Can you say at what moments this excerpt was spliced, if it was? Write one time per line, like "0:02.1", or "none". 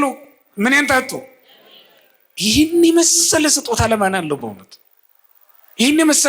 none